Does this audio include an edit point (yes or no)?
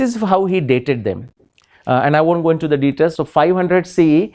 yes